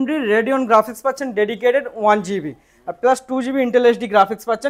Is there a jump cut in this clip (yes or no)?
no